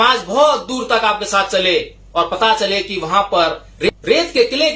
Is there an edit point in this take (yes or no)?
no